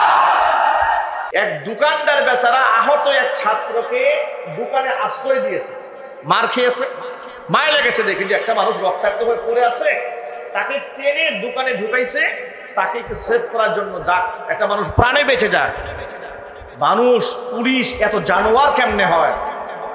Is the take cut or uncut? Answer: cut